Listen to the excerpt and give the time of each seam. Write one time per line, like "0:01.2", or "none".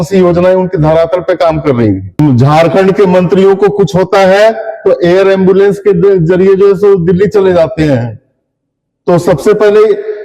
0:02.2